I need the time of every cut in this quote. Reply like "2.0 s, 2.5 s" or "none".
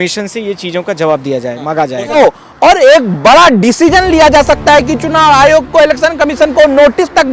2.2 s